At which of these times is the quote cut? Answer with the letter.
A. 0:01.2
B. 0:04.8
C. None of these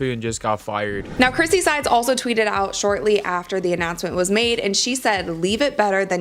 A